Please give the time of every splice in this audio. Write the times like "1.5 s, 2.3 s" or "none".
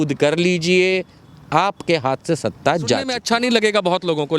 3.1 s